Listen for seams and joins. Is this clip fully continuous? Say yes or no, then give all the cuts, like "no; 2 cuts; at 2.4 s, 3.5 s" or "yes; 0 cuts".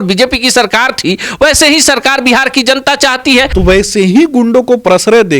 no; 1 cut; at 3.5 s